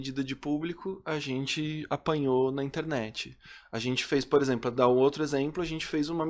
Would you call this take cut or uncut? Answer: uncut